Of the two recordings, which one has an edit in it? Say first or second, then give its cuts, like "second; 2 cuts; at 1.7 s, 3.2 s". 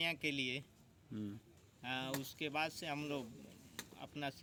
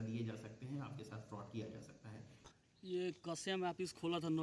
second; 1 cut; at 2.5 s